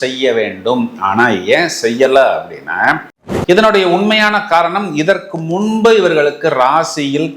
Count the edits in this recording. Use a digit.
1